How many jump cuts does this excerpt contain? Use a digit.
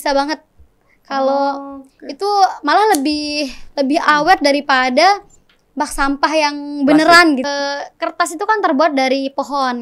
1